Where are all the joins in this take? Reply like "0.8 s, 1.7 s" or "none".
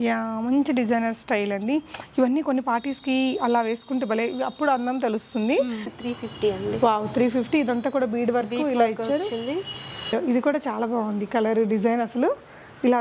5.9 s, 10.1 s